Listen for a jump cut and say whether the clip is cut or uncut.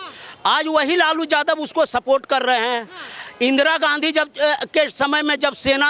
uncut